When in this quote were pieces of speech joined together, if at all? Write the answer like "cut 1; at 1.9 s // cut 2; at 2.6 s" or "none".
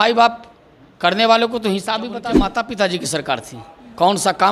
cut 1; at 2.5 s